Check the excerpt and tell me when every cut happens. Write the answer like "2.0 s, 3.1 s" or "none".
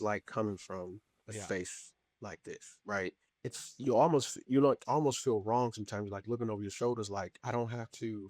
7.4 s